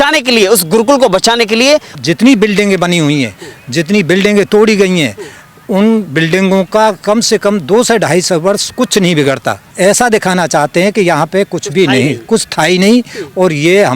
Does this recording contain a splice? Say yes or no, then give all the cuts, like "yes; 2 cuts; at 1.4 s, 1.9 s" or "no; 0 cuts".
yes; 2 cuts; at 1.9 s, 9.7 s